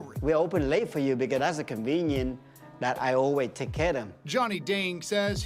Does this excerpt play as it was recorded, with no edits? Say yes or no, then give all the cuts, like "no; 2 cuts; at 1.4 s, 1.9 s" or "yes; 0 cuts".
yes; 0 cuts